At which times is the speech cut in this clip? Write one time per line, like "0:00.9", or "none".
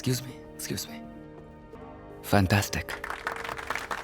0:01.7